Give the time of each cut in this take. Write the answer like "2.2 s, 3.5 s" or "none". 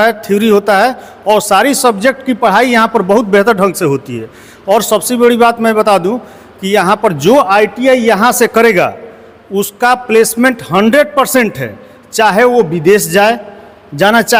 none